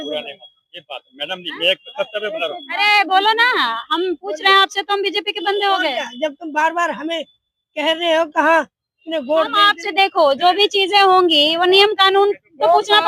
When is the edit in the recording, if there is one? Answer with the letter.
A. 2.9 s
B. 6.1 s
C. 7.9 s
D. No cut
D